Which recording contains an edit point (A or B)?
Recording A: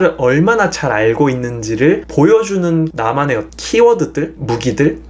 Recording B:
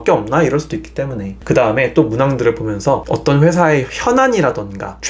B